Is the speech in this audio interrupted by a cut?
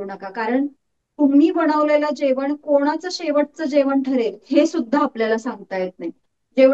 no; 0 cuts

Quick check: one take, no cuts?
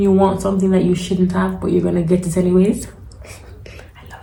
yes; 0 cuts

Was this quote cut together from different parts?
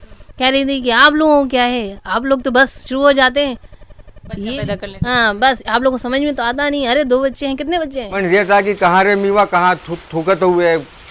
yes; 1 cut; at 8.1 s

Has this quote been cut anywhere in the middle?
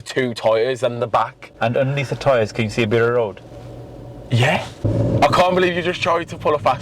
yes; 1 cut; at 4.8 s

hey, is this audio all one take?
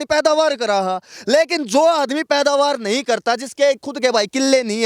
yes; 0 cuts

